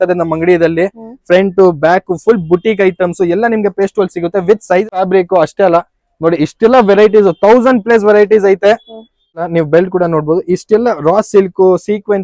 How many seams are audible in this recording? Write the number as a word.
two